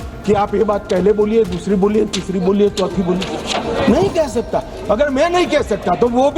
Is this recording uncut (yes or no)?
yes